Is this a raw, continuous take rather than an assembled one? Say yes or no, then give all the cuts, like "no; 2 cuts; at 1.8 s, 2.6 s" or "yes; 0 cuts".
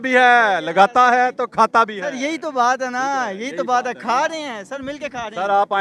yes; 0 cuts